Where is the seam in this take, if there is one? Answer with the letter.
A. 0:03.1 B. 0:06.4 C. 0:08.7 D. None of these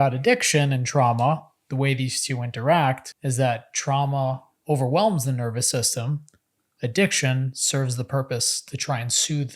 A